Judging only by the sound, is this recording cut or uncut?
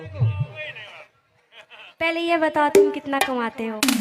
uncut